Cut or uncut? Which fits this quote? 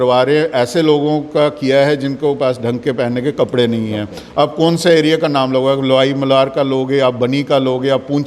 uncut